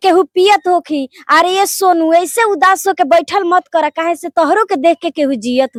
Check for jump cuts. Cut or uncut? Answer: uncut